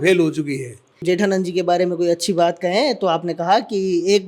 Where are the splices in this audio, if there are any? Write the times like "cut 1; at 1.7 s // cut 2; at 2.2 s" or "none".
cut 1; at 1.0 s

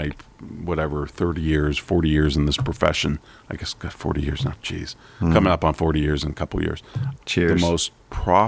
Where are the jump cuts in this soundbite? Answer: none

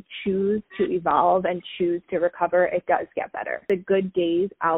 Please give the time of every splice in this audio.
cut 1; at 3.6 s

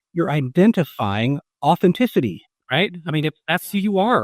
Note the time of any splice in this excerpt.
cut 1; at 2.5 s

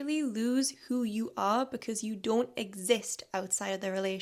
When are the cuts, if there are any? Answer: none

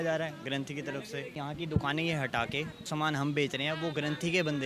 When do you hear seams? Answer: cut 1; at 1.5 s // cut 2; at 2.9 s

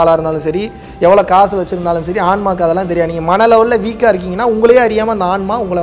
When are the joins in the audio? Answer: none

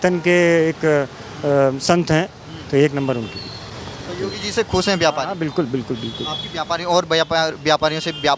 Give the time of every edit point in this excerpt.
none

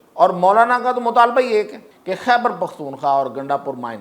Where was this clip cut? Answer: cut 1; at 1.9 s

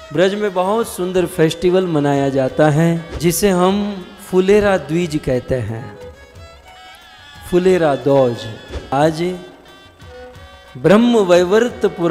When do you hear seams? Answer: cut 1; at 3.1 s // cut 2; at 8.9 s

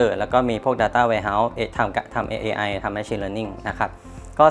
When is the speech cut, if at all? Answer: none

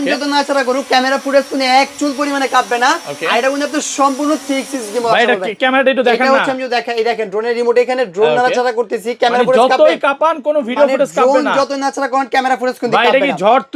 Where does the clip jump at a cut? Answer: none

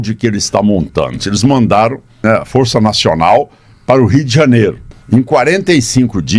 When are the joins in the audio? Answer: cut 1; at 1.2 s // cut 2; at 2.2 s

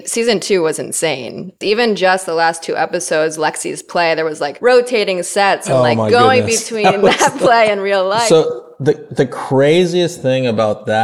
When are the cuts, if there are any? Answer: cut 1; at 1.6 s // cut 2; at 4.5 s // cut 3; at 5.7 s // cut 4; at 8.3 s

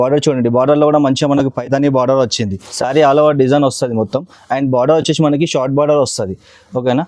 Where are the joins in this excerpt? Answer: cut 1; at 2.6 s

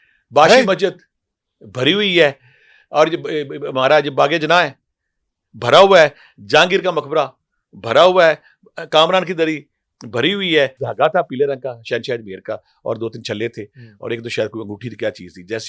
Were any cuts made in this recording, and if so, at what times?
cut 1; at 10.8 s

